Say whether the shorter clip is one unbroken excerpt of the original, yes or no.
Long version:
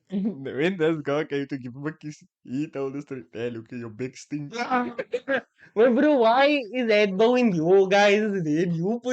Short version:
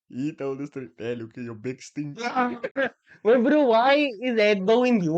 no